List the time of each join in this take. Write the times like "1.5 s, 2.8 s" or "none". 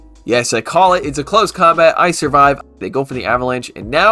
2.7 s